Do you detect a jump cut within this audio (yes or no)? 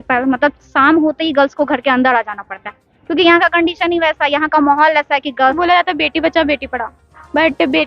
yes